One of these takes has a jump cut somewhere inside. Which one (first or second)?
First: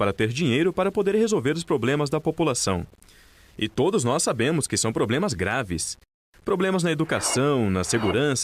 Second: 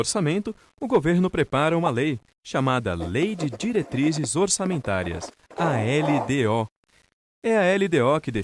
first